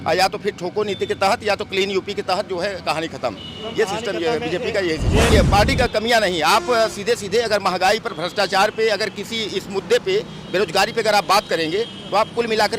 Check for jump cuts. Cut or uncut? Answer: cut